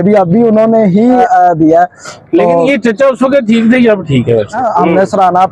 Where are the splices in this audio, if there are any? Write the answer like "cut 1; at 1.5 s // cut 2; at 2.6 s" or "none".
cut 1; at 1.2 s // cut 2; at 4.6 s